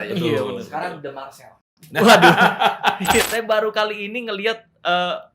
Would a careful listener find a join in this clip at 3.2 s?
yes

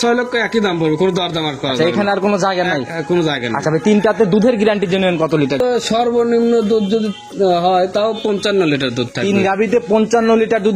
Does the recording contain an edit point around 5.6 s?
yes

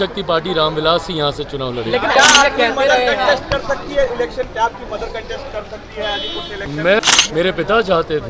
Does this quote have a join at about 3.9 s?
no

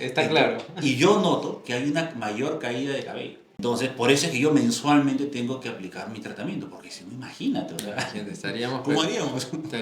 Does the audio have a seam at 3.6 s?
yes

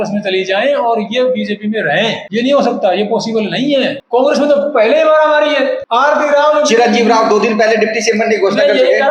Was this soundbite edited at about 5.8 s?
yes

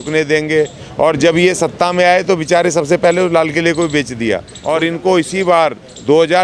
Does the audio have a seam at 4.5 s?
yes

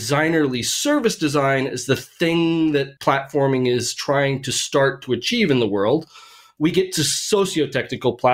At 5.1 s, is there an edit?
no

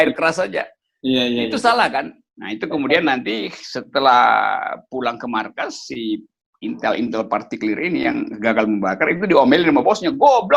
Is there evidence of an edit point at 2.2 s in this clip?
yes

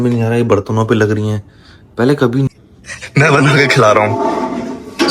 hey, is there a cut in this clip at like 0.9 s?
no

